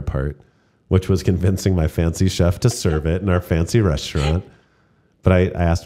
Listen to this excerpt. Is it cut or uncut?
uncut